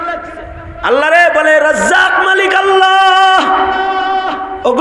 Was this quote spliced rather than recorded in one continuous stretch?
no; 0 cuts

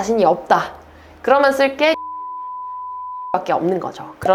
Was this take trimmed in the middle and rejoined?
no; 0 cuts

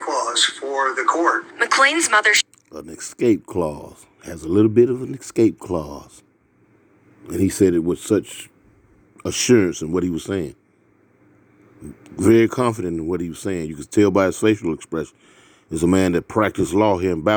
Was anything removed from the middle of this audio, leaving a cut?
no; 0 cuts

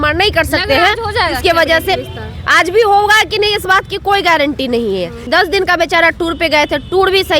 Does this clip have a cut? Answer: yes; 1 cut; at 5.3 s

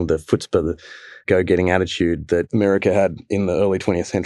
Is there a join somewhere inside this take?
yes; 2 cuts; at 1.2 s, 2.5 s

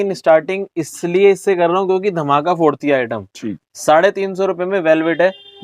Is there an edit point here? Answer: no; 0 cuts

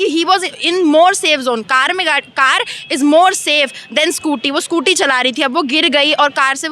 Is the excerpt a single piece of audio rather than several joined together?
yes; 0 cuts

